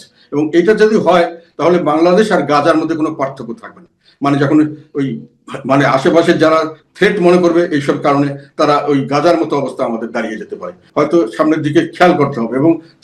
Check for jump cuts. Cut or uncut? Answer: cut